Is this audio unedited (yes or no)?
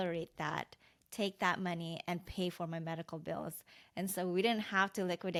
yes